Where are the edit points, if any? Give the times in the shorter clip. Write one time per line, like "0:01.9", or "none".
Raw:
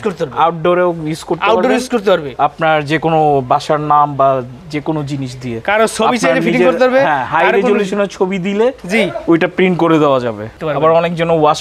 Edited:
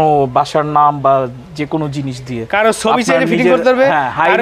none